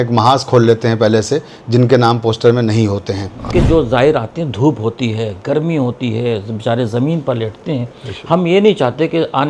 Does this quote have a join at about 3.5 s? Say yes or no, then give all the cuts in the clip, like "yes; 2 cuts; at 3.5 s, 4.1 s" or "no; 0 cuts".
yes; 1 cut; at 3.5 s